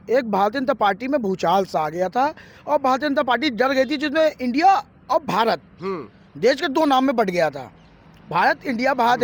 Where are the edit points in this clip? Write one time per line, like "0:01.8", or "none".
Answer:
none